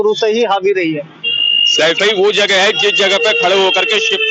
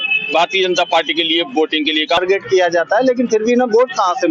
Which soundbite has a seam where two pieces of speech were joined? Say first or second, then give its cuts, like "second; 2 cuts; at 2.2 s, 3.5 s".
second; 1 cut; at 2.2 s